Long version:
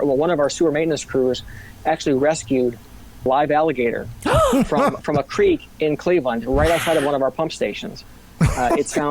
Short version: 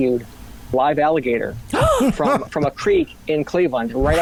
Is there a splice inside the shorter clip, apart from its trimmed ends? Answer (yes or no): no